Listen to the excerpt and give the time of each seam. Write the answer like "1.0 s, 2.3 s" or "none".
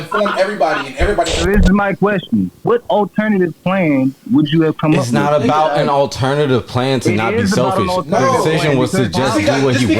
1.3 s, 2.6 s